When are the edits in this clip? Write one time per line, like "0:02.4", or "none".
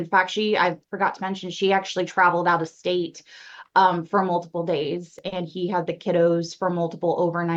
none